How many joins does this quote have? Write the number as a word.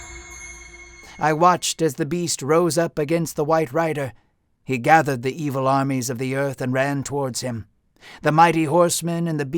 one